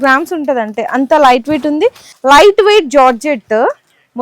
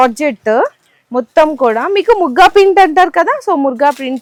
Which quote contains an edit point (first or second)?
first